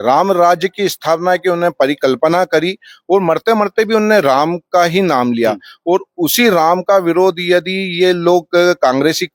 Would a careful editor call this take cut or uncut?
uncut